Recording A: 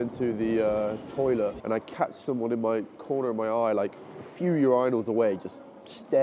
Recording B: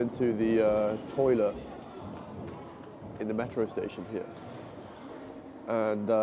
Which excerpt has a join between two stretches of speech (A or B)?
A